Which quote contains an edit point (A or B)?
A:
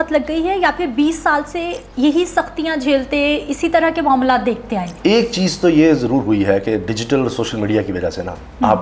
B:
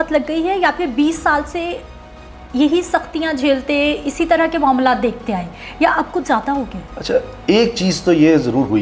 A